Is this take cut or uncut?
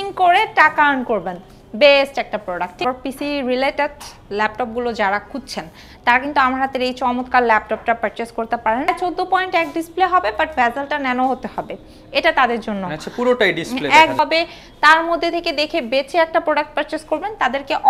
cut